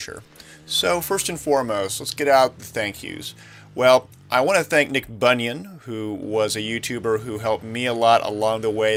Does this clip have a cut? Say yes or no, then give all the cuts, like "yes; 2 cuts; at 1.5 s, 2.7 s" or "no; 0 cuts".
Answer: no; 0 cuts